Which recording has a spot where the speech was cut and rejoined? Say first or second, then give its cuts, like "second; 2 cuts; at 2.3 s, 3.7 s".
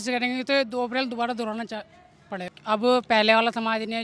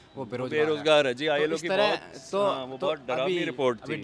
first; 1 cut; at 2.5 s